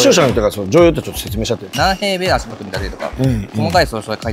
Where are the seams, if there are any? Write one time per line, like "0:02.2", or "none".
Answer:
0:01.7